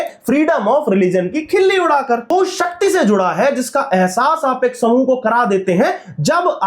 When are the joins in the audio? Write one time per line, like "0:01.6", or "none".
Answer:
0:02.3